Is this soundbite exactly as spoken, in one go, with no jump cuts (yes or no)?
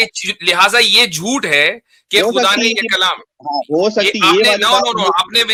yes